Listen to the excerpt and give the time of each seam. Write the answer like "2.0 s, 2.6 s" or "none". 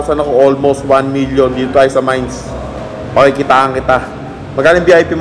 none